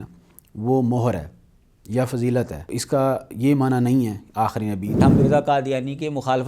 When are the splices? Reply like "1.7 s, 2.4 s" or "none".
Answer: 2.8 s, 5.0 s